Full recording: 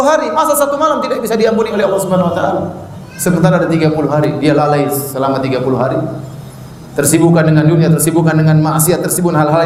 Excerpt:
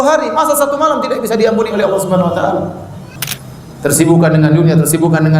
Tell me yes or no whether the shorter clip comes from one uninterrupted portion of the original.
no